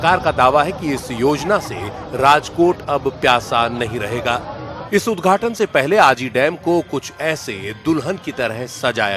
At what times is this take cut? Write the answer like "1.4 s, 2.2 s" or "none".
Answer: 3.4 s

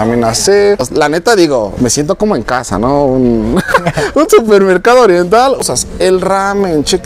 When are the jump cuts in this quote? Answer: 1.0 s, 5.7 s

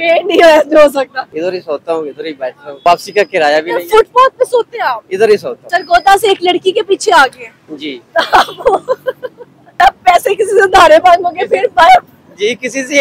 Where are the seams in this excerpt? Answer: 1.2 s, 2.7 s, 5.6 s, 9.7 s

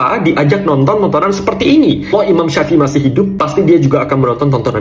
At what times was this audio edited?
2.1 s

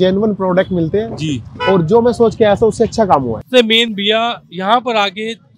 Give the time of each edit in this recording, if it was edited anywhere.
3.4 s

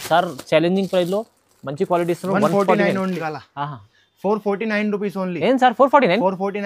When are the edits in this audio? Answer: 3.2 s

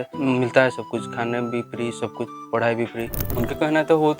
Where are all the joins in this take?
3.2 s

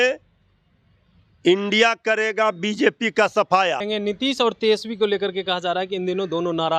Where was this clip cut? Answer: 3.8 s

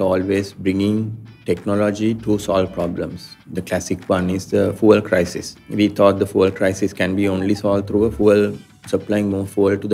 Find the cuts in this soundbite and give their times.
5.6 s

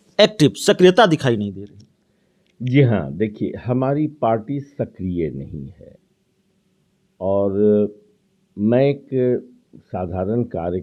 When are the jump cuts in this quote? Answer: none

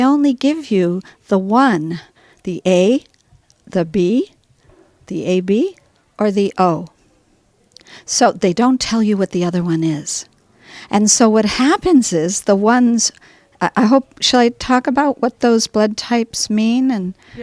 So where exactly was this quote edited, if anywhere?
1.6 s

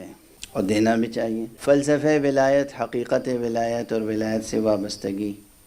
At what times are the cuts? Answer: 1.5 s

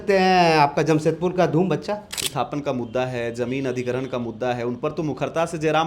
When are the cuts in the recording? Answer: 2.3 s

